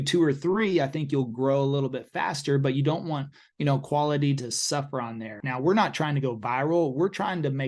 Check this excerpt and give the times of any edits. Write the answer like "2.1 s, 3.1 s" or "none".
5.4 s